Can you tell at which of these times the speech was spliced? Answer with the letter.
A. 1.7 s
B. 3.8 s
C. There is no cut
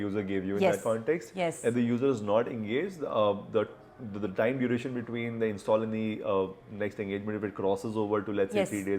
C